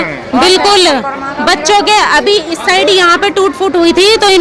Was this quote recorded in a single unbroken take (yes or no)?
yes